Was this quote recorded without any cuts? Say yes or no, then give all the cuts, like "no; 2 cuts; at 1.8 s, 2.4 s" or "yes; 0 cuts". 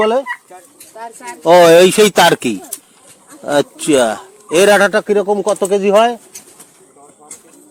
yes; 0 cuts